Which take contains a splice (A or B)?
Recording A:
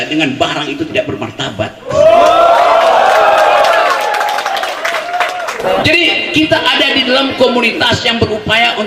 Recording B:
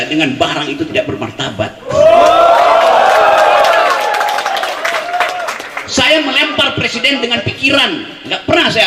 A